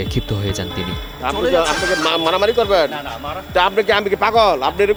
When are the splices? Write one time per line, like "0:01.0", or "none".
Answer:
none